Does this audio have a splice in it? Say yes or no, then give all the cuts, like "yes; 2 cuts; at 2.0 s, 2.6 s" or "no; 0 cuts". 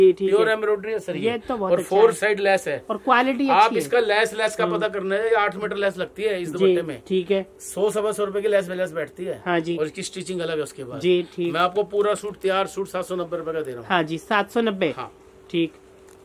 no; 0 cuts